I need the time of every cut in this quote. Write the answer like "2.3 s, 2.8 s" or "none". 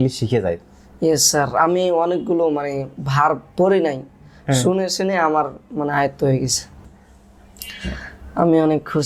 6.8 s